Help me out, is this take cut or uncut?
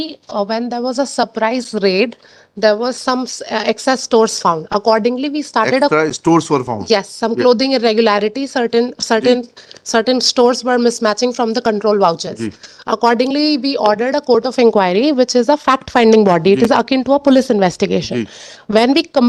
uncut